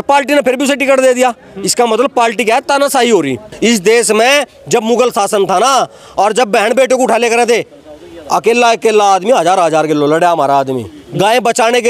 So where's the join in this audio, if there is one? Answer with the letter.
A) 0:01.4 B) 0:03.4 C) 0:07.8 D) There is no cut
B